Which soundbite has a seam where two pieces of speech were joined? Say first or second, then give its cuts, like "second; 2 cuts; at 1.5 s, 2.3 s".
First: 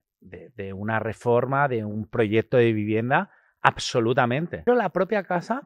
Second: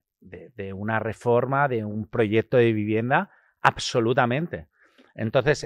first; 1 cut; at 4.7 s